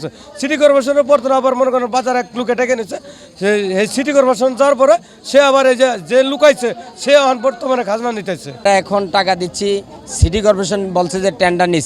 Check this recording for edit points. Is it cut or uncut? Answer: cut